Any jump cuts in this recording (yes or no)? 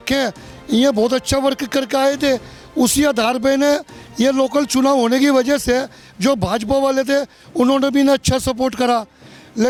no